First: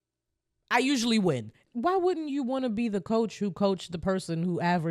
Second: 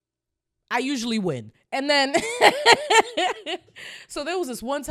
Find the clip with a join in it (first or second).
first